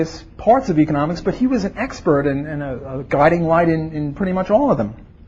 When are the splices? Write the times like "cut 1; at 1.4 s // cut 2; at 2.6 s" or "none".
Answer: cut 1; at 2.6 s